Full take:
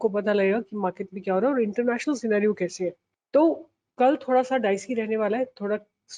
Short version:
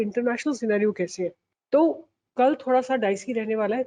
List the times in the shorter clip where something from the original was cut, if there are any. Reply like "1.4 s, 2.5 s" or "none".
none